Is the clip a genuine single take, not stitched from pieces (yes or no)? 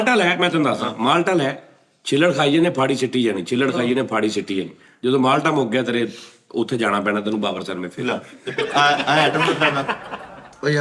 yes